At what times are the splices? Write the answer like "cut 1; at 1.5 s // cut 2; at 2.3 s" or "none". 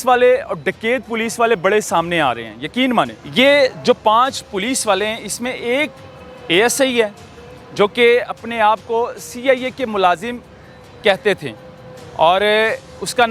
cut 1; at 3.2 s